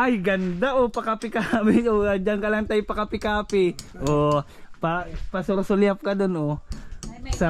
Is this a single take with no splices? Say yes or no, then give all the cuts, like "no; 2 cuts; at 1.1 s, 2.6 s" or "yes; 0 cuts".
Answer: yes; 0 cuts